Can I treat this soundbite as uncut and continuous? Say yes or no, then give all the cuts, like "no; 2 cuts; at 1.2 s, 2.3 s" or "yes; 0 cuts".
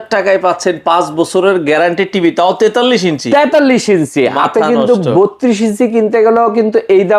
yes; 0 cuts